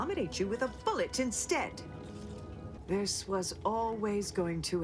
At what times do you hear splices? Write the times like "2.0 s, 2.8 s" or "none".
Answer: 2.7 s